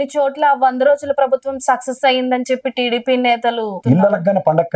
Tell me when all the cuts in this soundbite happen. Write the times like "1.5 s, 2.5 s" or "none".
3.8 s